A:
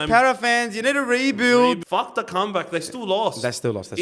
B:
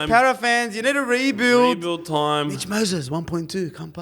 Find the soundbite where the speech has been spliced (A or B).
A